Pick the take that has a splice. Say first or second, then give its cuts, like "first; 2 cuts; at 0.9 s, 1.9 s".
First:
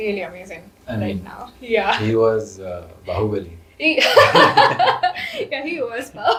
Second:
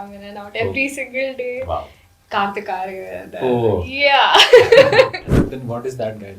second; 1 cut; at 5.3 s